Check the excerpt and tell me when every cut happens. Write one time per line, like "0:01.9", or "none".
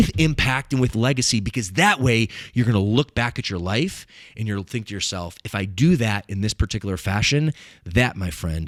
none